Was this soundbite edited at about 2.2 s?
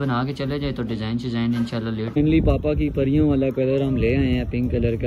yes; 1 cut; at 2.2 s

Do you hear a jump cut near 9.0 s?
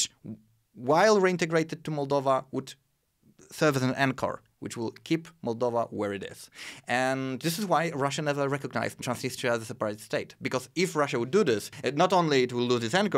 yes; 2 cuts; at 9.0 s, 11.7 s

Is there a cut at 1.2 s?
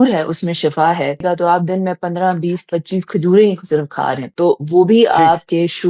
yes; 1 cut; at 1.2 s

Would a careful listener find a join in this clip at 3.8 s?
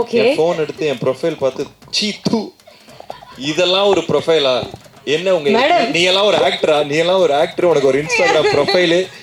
no; 0 cuts

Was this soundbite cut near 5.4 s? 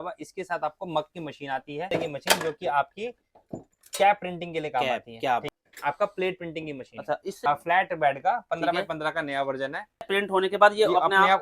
yes; 4 cuts; at 1.9 s, 5.4 s, 7.4 s, 10.1 s

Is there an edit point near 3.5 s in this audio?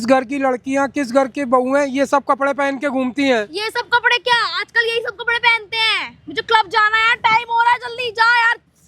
no; 0 cuts

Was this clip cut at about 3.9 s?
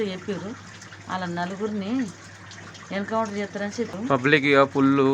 yes; 1 cut; at 3.9 s

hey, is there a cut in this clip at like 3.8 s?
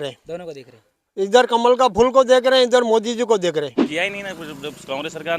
yes; 1 cut; at 3.8 s

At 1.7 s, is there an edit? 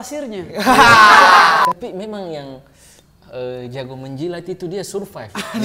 yes; 1 cut; at 1.7 s

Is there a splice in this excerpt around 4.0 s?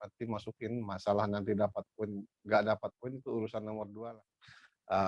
yes; 1 cut; at 4.0 s

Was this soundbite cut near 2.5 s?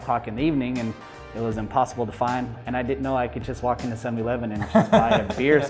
yes; 1 cut; at 2.5 s

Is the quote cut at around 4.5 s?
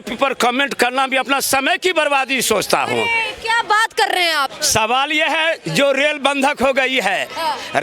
yes; 1 cut; at 4.5 s

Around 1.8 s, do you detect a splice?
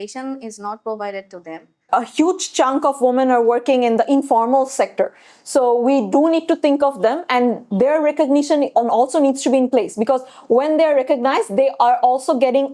yes; 1 cut; at 1.8 s

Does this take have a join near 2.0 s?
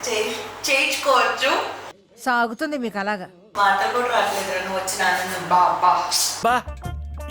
no; 1 cut; at 3.4 s

